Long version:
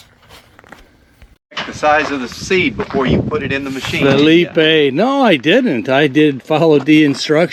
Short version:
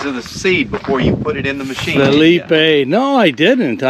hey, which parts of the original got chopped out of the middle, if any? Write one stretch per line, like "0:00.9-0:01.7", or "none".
none

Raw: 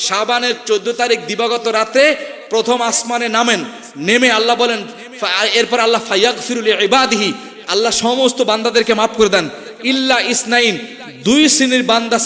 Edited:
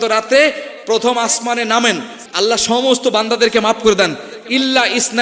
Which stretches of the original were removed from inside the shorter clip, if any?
0:03.8-0:07.5

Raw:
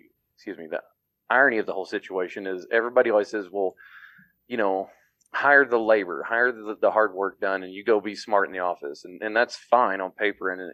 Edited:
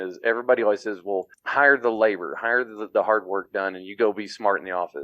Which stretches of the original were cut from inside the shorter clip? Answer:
0:03.9-0:05.3

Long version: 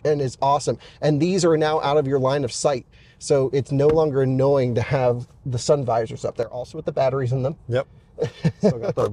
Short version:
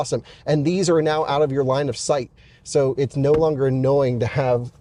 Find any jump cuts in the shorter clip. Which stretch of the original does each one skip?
none

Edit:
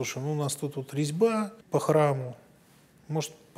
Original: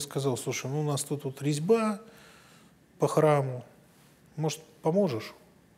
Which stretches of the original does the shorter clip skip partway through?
0:02.1-0:02.9

